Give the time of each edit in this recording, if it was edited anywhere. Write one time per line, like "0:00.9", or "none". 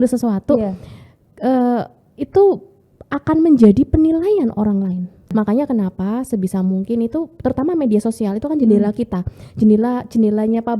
0:05.3